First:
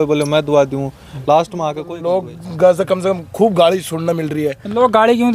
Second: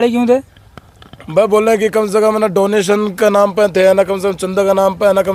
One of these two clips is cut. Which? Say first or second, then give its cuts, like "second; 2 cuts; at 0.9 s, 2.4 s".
first; 1 cut; at 1.8 s